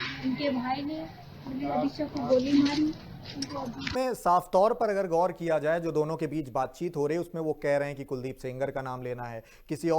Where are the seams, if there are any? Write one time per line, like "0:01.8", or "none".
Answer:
0:03.9